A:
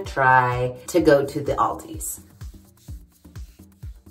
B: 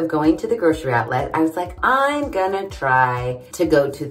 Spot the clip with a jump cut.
B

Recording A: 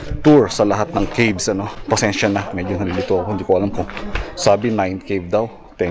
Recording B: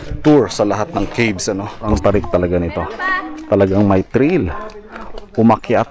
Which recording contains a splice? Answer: B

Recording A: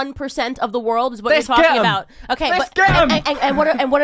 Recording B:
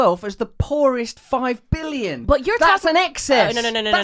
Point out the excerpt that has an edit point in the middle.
A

